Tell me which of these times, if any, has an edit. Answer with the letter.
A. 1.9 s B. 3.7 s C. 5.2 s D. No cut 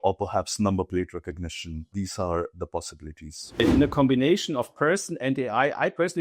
B